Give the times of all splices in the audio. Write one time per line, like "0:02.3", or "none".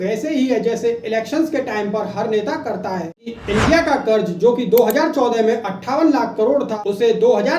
0:03.3